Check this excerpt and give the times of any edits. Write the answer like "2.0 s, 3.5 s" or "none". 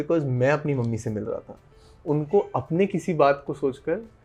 none

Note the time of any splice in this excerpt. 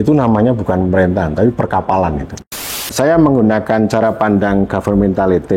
2.8 s

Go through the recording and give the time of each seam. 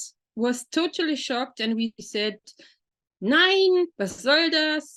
none

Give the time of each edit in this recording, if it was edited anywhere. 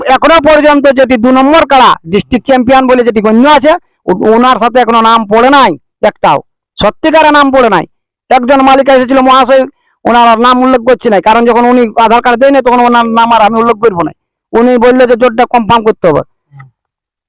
none

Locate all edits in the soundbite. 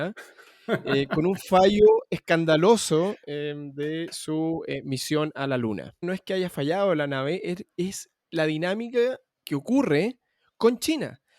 6.0 s, 9.3 s

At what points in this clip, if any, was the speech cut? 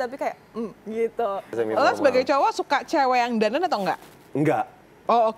1.6 s

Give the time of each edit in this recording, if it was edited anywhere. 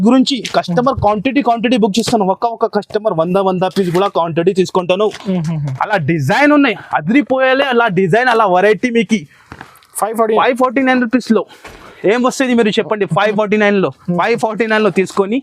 none

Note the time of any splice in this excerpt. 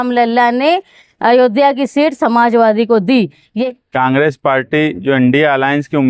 3.5 s

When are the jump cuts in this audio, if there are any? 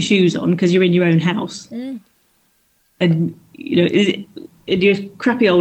none

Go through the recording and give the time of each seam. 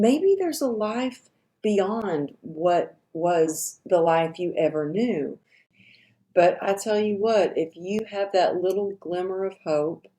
5.7 s

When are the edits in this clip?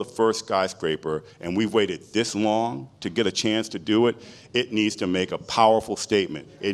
none

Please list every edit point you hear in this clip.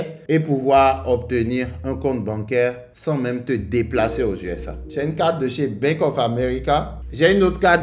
4.8 s

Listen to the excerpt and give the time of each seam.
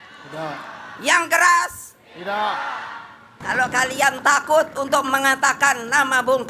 3.3 s

